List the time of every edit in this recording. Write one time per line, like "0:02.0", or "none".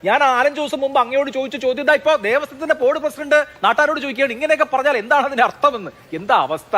none